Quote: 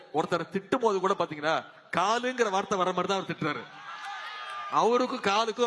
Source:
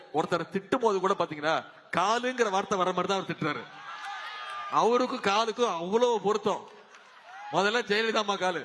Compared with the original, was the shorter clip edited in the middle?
no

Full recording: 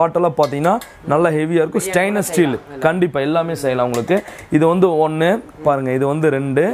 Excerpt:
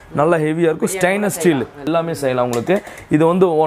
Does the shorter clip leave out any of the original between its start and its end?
yes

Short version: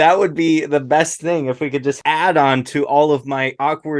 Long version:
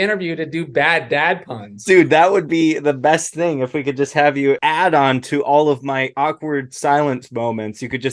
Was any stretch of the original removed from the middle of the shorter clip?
yes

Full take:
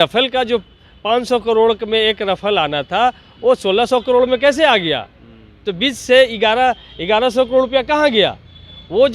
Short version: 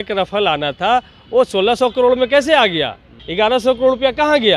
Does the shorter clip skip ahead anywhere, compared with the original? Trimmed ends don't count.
yes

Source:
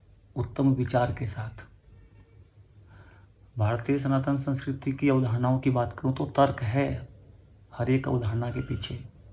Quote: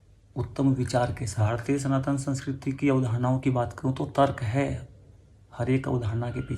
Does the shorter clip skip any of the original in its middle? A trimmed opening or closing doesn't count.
yes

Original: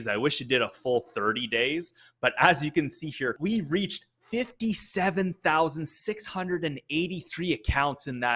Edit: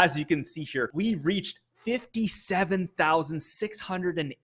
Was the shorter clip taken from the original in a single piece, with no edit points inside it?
yes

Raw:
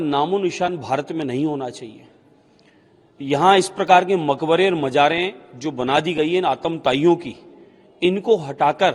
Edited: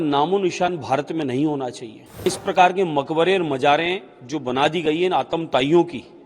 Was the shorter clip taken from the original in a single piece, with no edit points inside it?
no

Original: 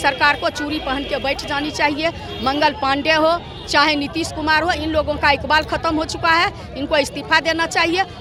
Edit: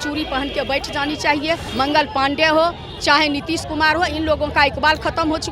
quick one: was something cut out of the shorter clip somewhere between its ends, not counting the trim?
yes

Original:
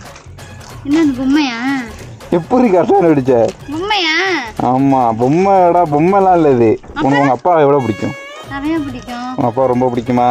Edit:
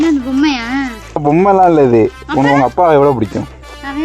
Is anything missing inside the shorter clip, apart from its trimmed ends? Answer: yes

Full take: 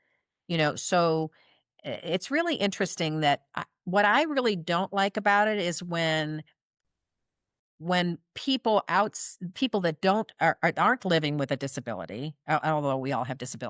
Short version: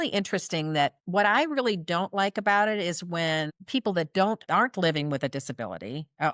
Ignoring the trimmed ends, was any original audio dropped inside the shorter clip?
yes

